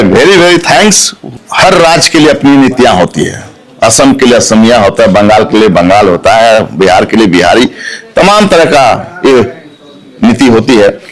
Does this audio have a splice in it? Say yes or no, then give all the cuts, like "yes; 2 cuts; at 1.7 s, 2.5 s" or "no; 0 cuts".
yes; 1 cut; at 1.3 s